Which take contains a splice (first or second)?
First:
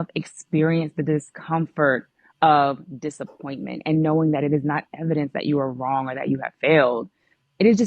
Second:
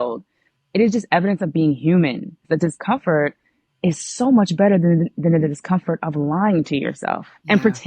second